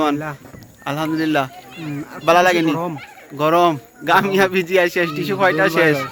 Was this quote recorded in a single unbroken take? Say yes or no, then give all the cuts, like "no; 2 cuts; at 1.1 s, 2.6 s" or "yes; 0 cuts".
yes; 0 cuts